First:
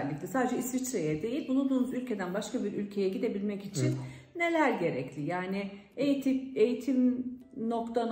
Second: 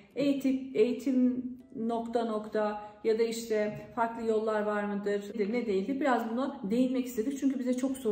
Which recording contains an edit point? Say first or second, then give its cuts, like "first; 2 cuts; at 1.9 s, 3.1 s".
second; 1 cut; at 5.3 s